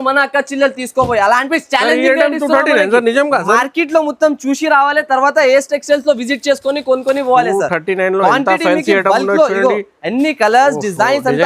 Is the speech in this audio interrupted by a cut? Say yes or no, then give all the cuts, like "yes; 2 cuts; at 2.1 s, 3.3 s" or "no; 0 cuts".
yes; 1 cut; at 1.5 s